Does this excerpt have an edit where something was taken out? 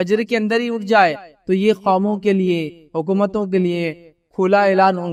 no; 0 cuts

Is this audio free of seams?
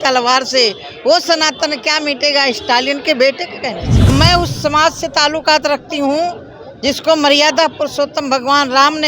no; 1 cut; at 4.1 s

